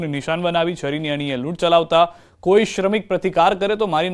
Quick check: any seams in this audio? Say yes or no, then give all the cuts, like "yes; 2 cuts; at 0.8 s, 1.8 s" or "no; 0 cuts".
no; 0 cuts